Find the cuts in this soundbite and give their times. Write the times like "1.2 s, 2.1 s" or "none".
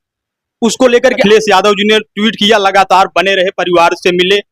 1.2 s